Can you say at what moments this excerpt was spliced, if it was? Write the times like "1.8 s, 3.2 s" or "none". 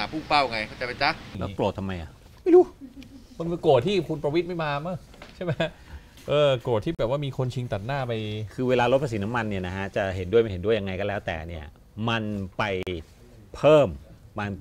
1.3 s